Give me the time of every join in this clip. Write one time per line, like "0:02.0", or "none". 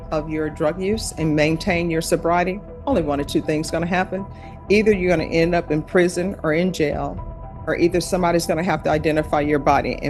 none